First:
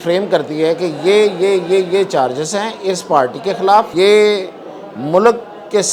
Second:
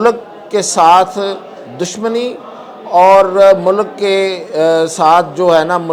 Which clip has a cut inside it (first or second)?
first